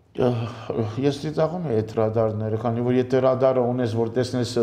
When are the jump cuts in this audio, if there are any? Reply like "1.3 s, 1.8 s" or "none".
none